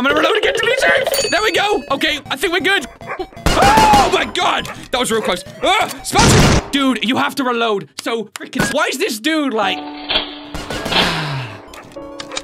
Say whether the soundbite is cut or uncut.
cut